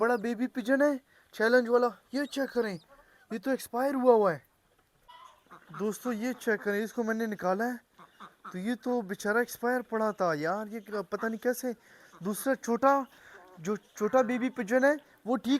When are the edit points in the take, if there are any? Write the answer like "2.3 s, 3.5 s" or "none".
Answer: none